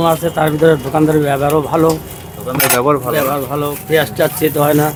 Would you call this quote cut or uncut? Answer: uncut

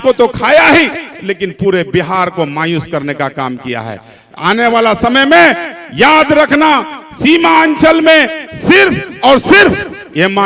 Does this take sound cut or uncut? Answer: uncut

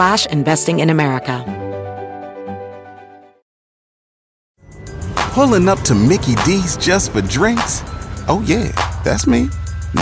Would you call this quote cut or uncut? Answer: cut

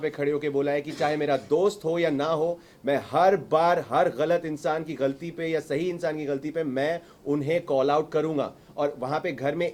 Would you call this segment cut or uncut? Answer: uncut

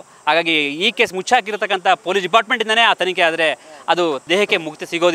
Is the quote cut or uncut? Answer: cut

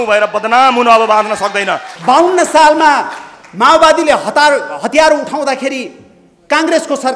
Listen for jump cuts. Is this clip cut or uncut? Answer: cut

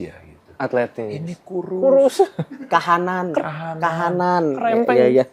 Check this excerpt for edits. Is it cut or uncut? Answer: uncut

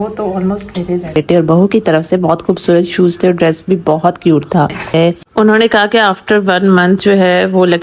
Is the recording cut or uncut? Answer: cut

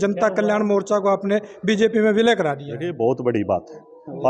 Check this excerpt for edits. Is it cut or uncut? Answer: uncut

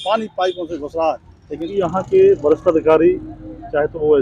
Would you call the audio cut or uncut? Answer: cut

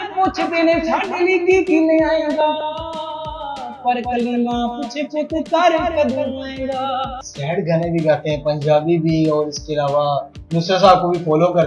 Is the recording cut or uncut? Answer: cut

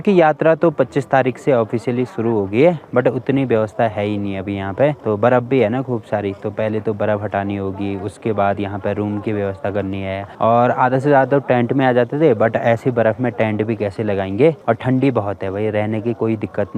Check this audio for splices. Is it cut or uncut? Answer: uncut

